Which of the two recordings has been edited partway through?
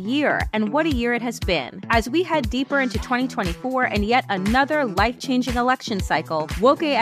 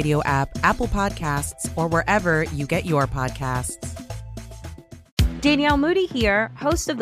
second; 1 cut; at 5.0 s

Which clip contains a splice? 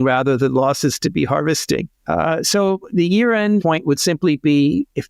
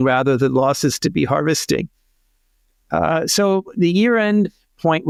first; 2 cuts; at 1.9 s, 3.6 s

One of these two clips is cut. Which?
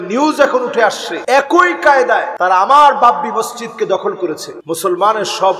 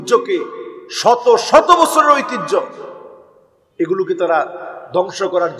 first; 3 cuts; at 1.1 s, 2.3 s, 4.5 s

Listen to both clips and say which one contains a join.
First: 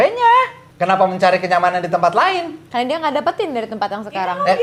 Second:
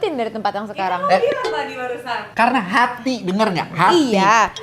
second; 1 cut; at 2.3 s

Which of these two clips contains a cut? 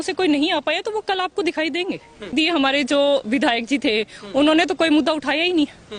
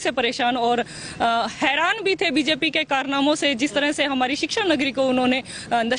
first; 1 cut; at 2.3 s

